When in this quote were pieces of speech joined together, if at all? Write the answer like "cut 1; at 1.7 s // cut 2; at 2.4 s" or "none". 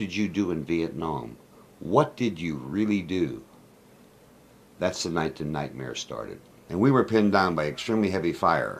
cut 1; at 6.5 s